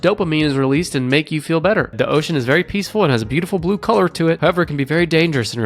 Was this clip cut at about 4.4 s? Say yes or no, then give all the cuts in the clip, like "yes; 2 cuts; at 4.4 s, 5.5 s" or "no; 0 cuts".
yes; 2 cuts; at 1.9 s, 4.4 s